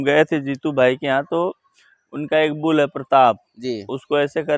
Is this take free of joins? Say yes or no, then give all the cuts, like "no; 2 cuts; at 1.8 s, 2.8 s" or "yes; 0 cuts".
yes; 0 cuts